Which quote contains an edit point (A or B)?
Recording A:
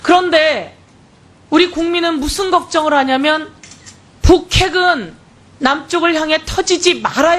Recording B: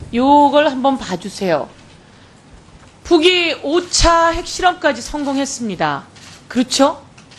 B